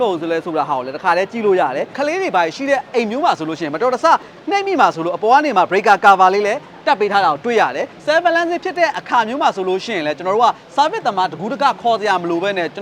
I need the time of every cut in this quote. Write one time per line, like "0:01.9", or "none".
0:01.9
0:07.9